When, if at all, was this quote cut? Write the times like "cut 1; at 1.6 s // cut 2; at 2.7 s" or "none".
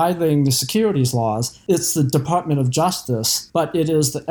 cut 1; at 1.5 s // cut 2; at 3.4 s